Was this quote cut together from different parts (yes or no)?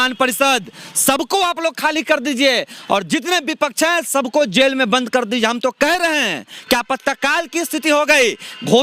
no